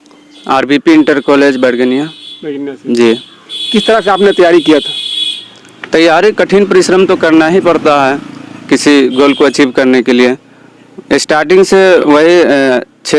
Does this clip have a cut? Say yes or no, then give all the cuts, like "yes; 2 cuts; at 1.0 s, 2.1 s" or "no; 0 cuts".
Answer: no; 0 cuts